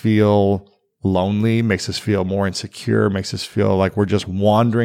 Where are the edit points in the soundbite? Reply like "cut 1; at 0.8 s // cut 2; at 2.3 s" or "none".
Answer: none